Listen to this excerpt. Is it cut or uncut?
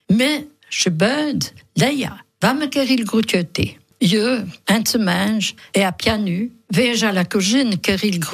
cut